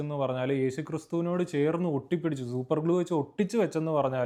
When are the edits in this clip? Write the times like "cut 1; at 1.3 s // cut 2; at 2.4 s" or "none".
none

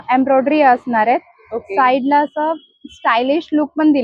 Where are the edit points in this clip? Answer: none

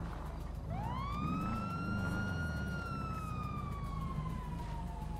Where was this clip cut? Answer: none

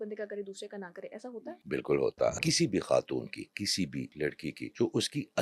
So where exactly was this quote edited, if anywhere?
cut 1; at 1.6 s // cut 2; at 2.3 s // cut 3; at 4.2 s

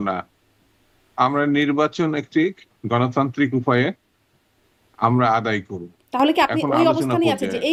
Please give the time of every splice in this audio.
none

